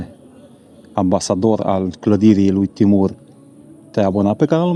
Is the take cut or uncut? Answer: uncut